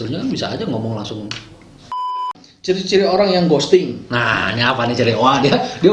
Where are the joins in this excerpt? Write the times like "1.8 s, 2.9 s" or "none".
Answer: 2.1 s

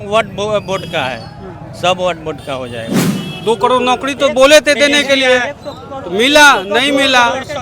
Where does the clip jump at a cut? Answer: 3.0 s

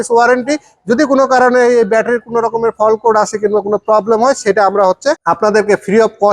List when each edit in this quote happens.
5.2 s

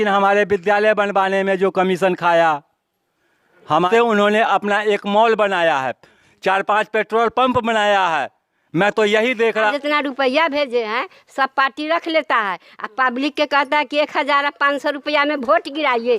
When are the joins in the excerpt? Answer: 3.9 s, 9.7 s

